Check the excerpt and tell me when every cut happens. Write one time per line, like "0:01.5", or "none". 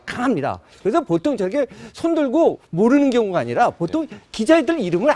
0:01.7